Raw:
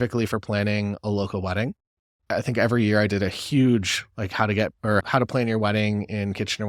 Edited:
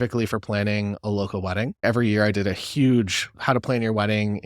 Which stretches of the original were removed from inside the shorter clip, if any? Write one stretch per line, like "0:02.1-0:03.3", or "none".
0:01.8-0:02.6
0:04.2-0:05.1